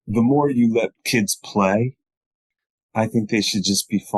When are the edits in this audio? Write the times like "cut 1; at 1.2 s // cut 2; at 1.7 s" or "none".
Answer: cut 1; at 1.0 s // cut 2; at 2.5 s